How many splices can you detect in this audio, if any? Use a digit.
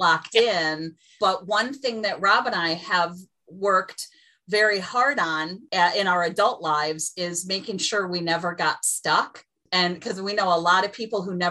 3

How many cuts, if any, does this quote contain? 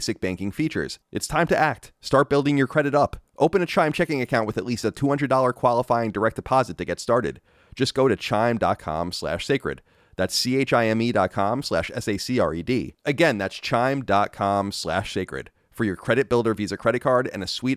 1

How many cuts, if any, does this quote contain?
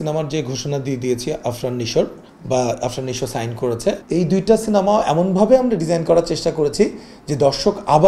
1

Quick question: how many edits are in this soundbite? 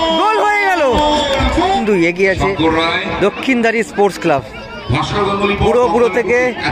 1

